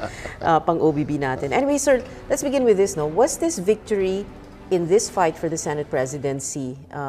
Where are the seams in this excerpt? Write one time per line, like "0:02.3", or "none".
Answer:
0:03.8